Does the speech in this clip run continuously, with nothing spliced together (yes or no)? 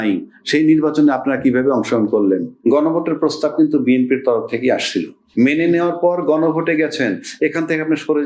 no